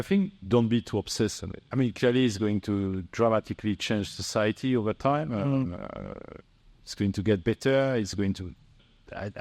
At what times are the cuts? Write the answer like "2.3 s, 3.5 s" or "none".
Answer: 1.6 s